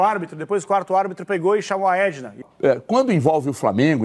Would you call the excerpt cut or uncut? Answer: cut